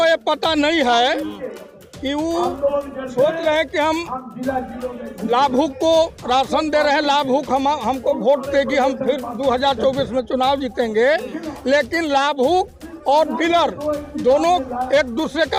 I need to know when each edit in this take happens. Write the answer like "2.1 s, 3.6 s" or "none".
none